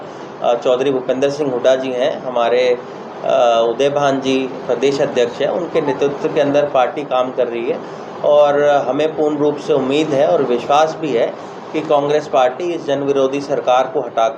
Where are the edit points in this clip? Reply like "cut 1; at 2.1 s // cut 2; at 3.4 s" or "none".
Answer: none